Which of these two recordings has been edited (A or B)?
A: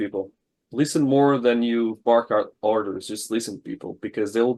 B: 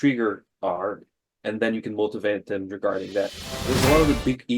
B